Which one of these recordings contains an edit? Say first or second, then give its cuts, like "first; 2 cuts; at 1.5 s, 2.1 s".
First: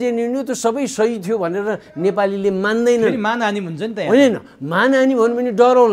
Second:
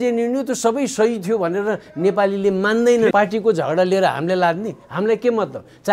second; 1 cut; at 3.1 s